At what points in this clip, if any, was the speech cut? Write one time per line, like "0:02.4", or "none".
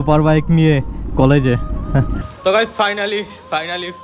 0:02.2